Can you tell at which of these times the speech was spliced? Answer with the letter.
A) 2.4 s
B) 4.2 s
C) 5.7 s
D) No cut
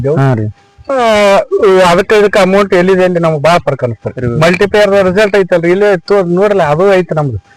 B